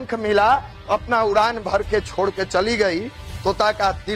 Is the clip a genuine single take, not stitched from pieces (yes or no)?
yes